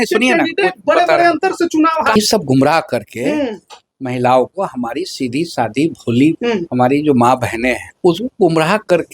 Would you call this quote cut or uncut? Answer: cut